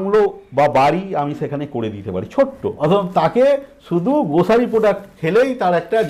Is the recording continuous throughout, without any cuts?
no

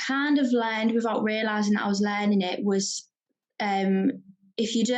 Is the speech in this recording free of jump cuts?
yes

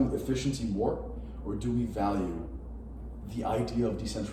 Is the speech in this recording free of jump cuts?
yes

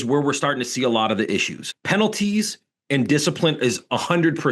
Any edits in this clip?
yes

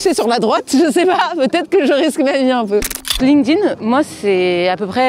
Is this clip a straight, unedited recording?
no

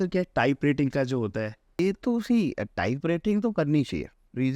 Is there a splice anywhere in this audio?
yes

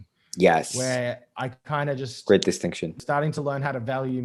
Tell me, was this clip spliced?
yes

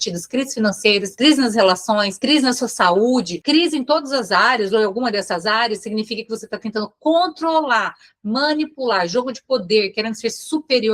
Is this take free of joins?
no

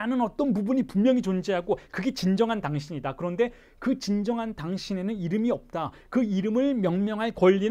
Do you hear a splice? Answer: no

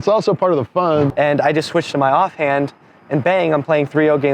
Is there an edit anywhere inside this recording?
yes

